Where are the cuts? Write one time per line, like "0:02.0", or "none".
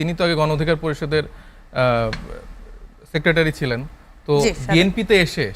none